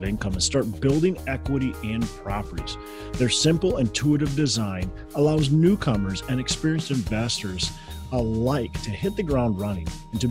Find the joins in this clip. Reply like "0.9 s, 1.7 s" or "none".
none